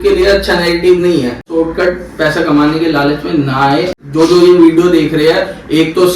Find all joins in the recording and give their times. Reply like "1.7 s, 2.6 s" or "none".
1.5 s, 4.0 s